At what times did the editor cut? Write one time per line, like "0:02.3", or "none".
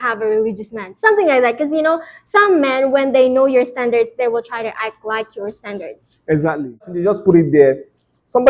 0:06.9